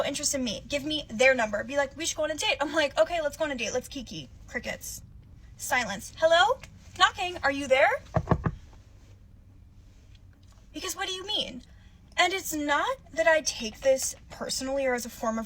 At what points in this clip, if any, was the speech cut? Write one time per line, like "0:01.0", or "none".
0:06.8